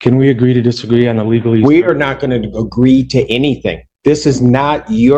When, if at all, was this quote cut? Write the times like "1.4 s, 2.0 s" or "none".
none